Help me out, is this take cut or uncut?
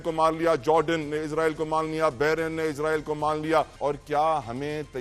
cut